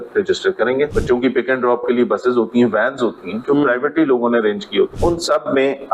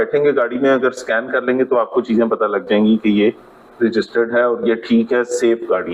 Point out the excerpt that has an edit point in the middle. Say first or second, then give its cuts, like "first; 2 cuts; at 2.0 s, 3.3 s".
first; 2 cuts; at 0.9 s, 4.9 s